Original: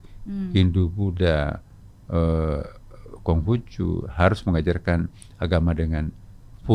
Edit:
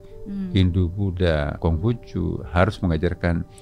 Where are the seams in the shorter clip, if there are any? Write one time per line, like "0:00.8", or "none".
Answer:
0:01.5